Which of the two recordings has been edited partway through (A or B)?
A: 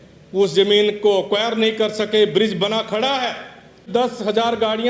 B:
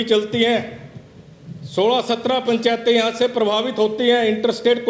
A